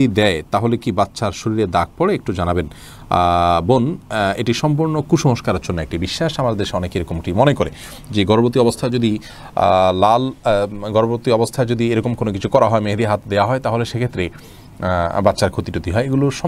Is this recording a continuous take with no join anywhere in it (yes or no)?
yes